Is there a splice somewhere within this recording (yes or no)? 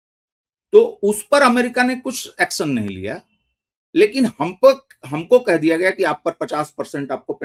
no